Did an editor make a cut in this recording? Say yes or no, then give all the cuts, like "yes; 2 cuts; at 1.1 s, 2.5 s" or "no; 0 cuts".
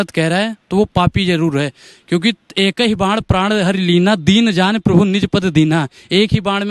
no; 0 cuts